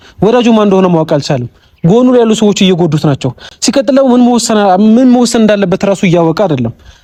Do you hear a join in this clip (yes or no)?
no